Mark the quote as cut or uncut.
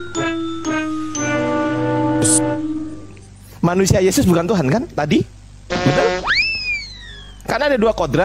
uncut